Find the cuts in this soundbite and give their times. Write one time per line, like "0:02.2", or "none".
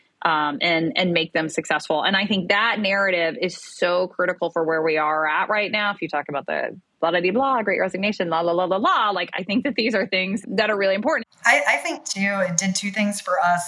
0:10.4
0:11.2

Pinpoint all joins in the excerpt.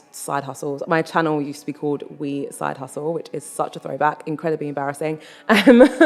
none

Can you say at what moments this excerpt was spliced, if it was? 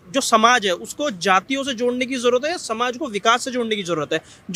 none

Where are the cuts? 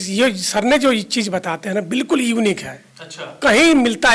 none

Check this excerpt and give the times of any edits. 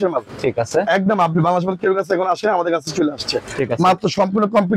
none

